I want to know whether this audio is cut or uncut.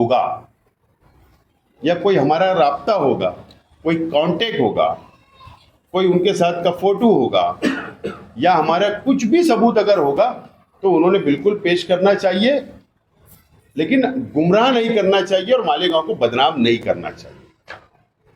uncut